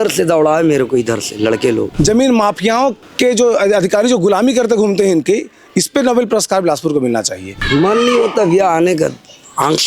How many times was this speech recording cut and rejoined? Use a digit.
3